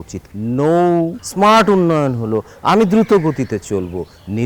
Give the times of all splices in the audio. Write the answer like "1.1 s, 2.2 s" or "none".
1.2 s

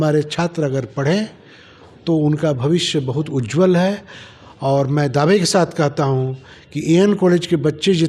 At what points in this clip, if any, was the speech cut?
none

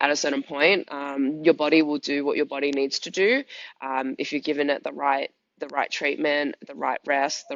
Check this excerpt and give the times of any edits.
none

